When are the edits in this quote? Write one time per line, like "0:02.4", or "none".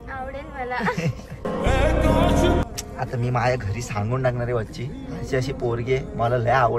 0:02.6